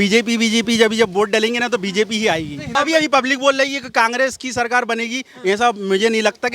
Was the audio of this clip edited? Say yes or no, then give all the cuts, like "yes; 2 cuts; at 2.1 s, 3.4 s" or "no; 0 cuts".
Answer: yes; 1 cut; at 2.7 s